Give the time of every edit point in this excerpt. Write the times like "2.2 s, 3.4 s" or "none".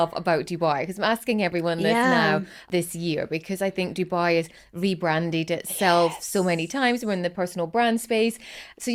none